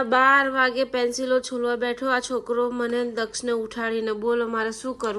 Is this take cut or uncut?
uncut